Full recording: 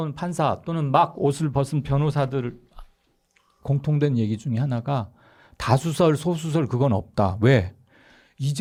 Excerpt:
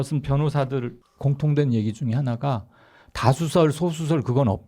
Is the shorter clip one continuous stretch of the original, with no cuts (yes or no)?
no